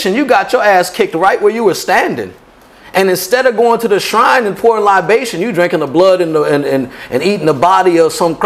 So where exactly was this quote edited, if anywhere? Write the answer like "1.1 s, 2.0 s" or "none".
none